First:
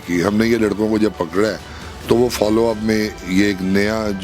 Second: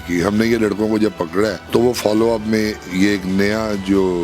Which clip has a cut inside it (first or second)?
second